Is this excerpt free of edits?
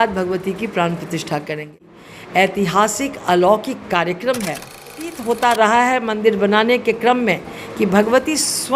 no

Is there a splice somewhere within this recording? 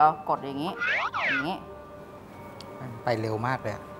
no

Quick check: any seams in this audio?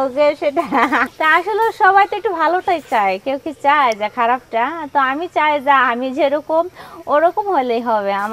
yes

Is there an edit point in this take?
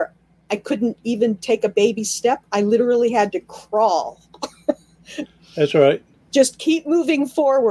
no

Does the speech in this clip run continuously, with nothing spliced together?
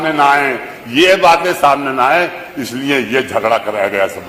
yes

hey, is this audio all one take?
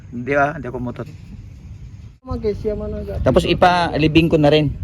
no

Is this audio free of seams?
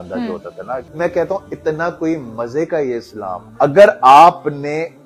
no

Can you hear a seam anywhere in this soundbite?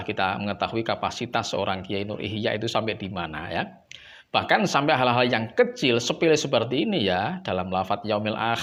no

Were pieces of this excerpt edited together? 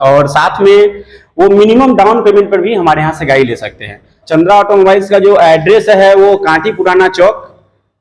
yes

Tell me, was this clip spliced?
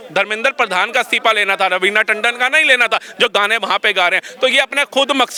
no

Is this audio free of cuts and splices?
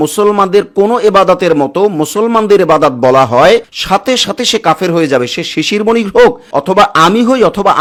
yes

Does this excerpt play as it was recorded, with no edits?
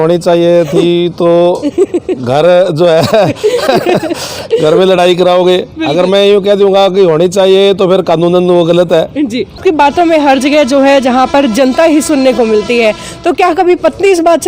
no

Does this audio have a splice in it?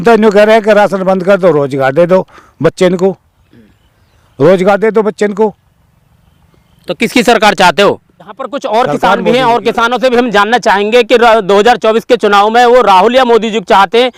no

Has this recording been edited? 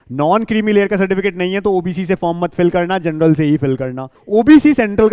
yes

